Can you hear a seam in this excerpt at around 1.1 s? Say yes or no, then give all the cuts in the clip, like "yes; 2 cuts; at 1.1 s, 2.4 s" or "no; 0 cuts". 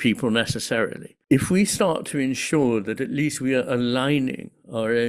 yes; 1 cut; at 1.1 s